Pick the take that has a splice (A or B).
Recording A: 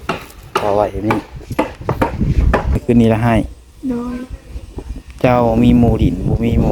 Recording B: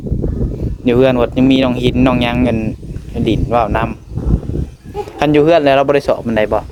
A